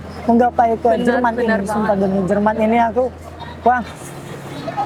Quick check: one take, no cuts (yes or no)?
yes